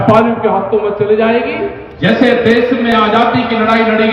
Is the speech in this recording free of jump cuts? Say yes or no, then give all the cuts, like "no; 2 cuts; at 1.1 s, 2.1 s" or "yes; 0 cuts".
no; 1 cut; at 1.8 s